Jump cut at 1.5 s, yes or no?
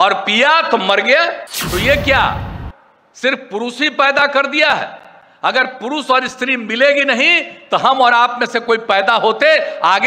yes